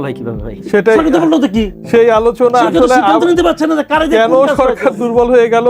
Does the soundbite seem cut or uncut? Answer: uncut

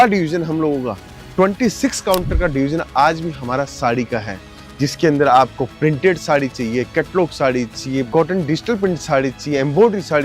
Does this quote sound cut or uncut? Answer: cut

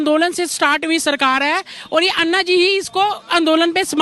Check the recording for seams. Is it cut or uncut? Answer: uncut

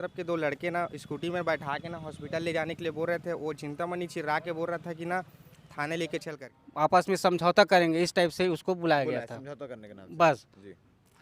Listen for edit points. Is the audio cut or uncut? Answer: cut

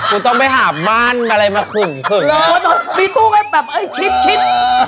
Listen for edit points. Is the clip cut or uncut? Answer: uncut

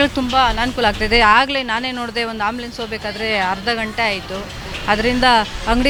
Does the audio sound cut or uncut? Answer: uncut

